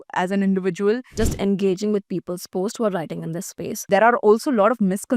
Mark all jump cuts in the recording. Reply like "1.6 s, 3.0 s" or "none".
1.1 s, 3.8 s